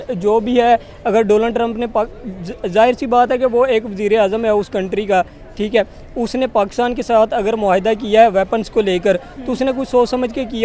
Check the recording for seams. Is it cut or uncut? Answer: uncut